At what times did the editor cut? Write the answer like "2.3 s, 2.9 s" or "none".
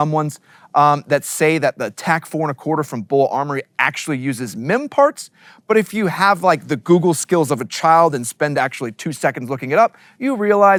none